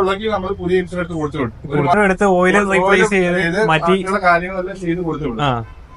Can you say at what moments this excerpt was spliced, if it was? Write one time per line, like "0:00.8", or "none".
0:01.9

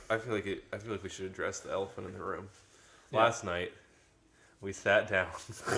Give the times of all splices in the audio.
0:03.0

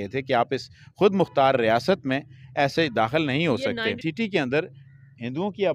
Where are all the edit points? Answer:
0:04.0

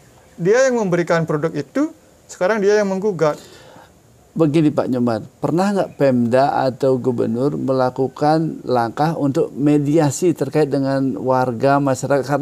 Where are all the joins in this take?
none

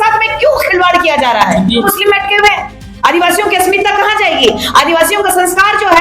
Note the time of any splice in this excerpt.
0:01.9

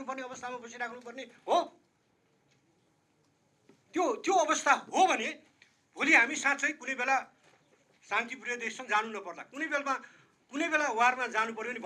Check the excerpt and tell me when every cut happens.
none

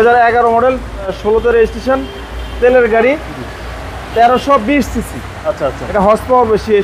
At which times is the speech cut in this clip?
0:01.1

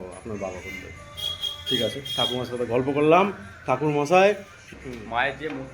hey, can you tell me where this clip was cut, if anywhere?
0:04.7

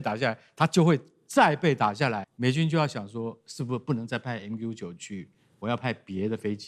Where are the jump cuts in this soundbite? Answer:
0:02.3

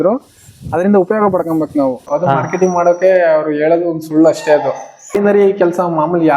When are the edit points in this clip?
0:02.1
0:05.1

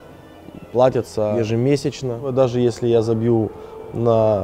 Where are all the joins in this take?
0:01.3
0:02.3

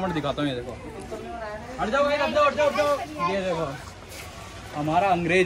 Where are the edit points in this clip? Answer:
none

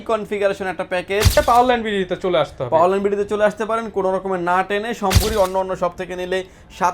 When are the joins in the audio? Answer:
0:01.4
0:05.2

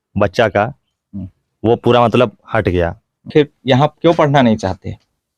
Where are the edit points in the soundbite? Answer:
0:03.3

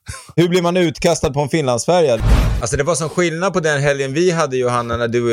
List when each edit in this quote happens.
0:02.3

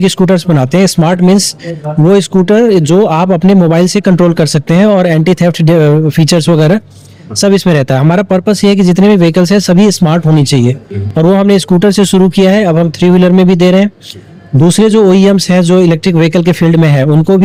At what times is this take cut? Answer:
none

